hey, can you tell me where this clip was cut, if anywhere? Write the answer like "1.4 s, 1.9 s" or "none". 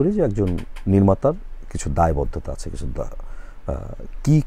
none